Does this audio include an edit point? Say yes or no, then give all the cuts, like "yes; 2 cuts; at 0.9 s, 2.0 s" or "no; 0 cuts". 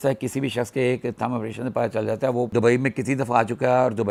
no; 0 cuts